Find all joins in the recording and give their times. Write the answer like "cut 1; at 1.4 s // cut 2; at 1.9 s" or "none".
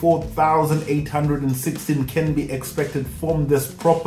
none